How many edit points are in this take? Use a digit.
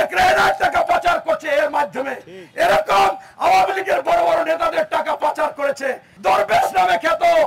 1